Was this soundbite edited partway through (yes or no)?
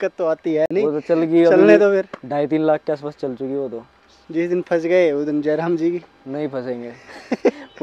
no